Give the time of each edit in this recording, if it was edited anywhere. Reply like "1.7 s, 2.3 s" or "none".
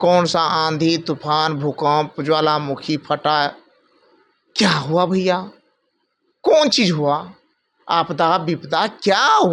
none